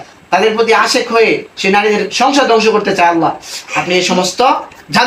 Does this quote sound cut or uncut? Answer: uncut